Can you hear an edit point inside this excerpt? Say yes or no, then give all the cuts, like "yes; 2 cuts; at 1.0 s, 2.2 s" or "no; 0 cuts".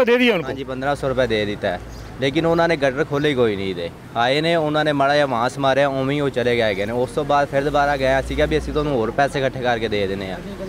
no; 0 cuts